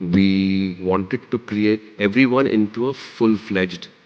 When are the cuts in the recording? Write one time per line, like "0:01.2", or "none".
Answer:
0:00.8
0:01.9

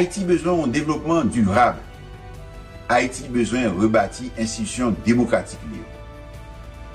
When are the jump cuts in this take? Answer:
0:05.9

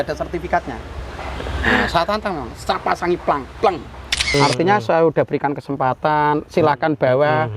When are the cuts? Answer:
0:04.3

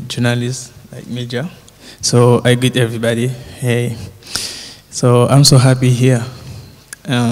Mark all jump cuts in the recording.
0:03.0

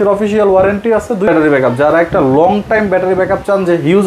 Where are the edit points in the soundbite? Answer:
0:01.3

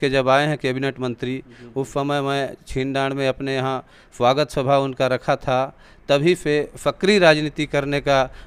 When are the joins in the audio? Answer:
none

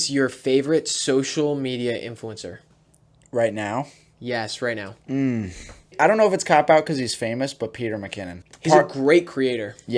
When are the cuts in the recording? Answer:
0:05.9

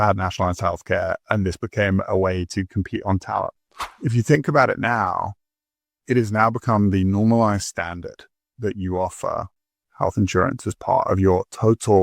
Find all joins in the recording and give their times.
0:04.0

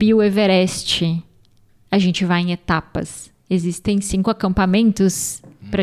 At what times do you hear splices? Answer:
none

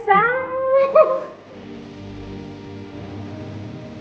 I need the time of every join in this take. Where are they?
0:01.1

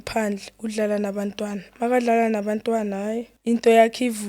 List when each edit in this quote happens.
0:03.3

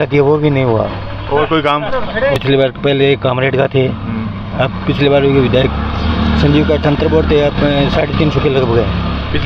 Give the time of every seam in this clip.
0:02.4

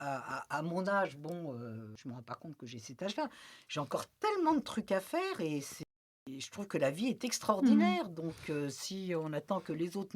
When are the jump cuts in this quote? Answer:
0:01.9
0:05.8

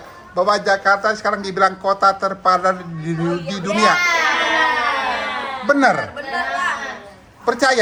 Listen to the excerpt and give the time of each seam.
none

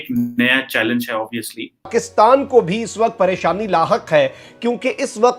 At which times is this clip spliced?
0:01.9

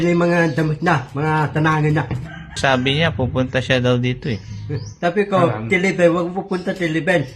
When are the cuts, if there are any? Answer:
0:02.6

